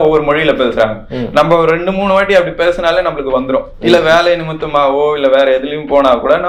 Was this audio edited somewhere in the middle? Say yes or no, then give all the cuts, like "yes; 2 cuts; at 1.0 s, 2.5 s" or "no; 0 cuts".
no; 0 cuts